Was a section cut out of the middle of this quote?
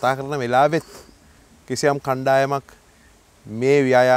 no; 0 cuts

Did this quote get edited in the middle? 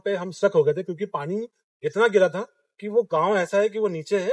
no; 0 cuts

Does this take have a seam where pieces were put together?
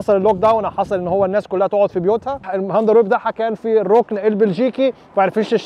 yes; 1 cut; at 2.5 s

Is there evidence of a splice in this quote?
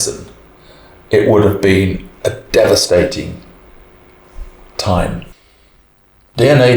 yes; 1 cut; at 5.3 s

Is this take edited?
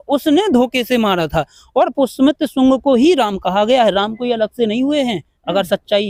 no; 0 cuts

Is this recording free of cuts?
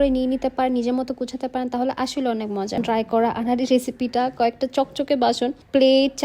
no; 1 cut; at 2.8 s

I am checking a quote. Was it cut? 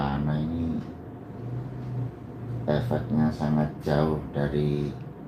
no; 0 cuts

